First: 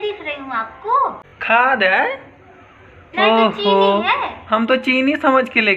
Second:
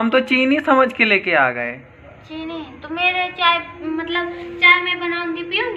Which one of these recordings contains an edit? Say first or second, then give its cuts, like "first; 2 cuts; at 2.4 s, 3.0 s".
first; 1 cut; at 1.3 s